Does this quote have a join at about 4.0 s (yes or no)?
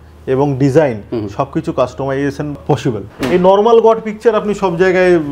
no